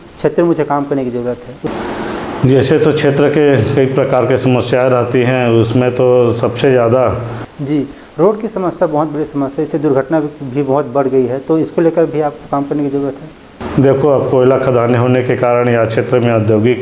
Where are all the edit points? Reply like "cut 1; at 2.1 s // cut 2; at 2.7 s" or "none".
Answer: cut 1; at 1.5 s // cut 2; at 7.5 s